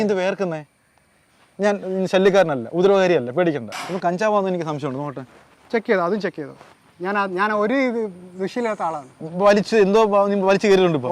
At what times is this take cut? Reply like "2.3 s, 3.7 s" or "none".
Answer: 3.9 s